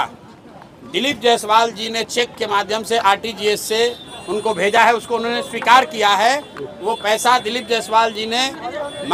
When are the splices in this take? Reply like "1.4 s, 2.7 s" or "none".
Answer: none